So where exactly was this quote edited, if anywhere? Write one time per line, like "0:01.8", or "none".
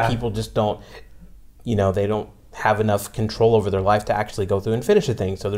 none